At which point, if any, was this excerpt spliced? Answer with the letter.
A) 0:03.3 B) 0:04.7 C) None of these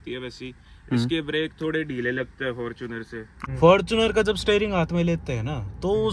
A